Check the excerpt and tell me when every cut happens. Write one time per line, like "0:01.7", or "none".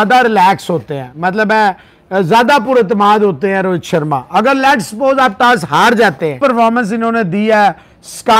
0:06.4